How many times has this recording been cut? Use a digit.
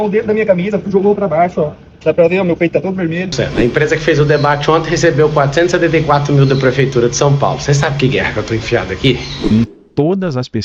2